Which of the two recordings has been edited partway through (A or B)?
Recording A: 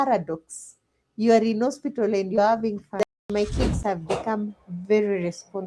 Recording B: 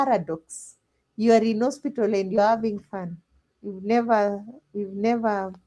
A